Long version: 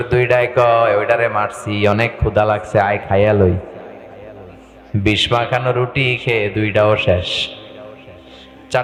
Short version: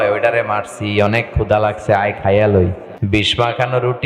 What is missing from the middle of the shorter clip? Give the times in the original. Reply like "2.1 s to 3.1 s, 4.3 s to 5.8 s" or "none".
3.8 s to 4.8 s

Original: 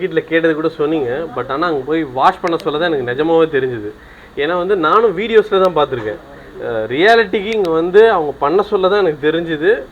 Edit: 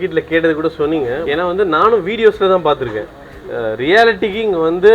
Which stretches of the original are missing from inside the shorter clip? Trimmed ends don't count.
1.2 s to 4.3 s

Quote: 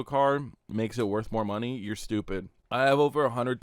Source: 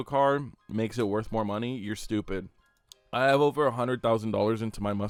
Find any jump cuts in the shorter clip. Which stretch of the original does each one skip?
2.5 s to 3.0 s

